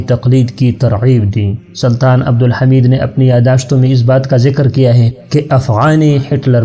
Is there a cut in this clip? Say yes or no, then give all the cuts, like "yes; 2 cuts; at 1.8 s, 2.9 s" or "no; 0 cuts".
yes; 2 cuts; at 1.6 s, 5.1 s